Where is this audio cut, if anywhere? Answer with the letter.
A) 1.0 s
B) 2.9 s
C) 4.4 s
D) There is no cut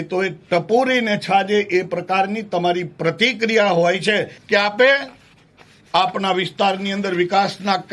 C